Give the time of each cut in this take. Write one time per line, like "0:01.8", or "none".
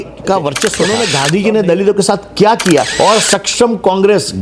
0:01.0
0:02.9